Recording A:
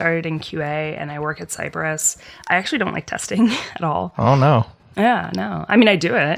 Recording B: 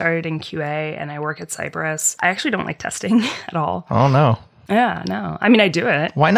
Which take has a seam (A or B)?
B